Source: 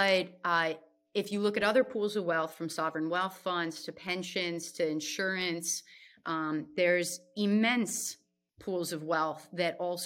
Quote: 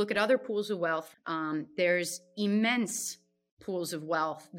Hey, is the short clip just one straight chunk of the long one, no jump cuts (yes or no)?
no